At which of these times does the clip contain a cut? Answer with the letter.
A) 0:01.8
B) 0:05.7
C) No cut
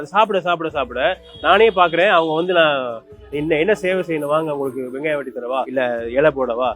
B